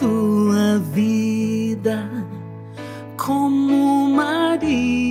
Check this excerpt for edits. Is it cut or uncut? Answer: uncut